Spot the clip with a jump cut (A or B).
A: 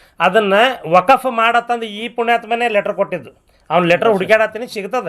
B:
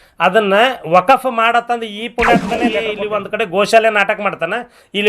B